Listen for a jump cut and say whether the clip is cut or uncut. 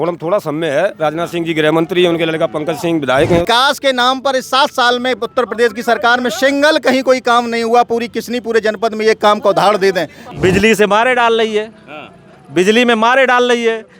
cut